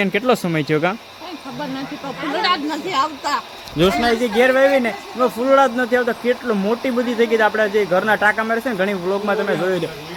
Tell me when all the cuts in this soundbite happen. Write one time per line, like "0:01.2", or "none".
none